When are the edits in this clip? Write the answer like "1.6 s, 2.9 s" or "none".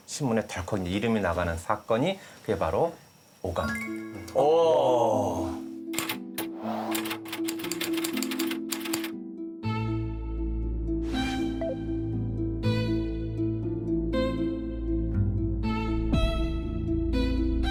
none